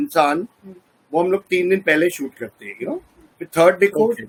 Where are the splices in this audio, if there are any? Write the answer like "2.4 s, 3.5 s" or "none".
none